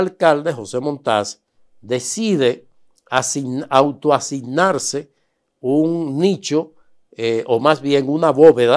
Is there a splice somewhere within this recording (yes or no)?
no